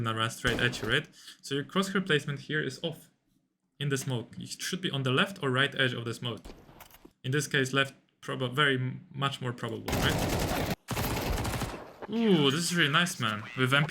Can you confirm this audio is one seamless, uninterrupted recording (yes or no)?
no